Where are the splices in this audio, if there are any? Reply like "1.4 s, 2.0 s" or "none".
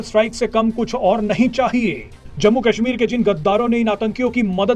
none